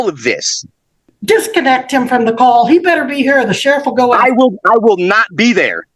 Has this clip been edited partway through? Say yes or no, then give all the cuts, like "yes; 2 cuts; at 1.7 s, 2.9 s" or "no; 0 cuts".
yes; 1 cut; at 1.1 s